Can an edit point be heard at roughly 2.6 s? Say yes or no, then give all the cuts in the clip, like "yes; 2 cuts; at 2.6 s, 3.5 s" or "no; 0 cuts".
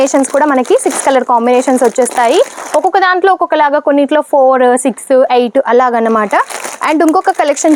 no; 0 cuts